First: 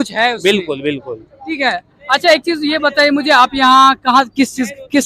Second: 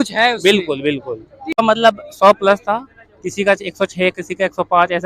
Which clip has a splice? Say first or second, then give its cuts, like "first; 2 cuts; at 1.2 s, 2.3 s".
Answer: second; 1 cut; at 1.6 s